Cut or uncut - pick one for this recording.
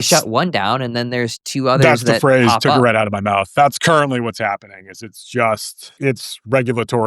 cut